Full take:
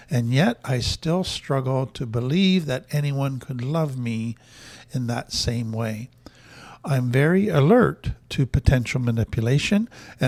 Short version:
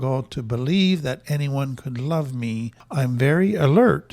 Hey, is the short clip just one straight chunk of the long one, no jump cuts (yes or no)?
no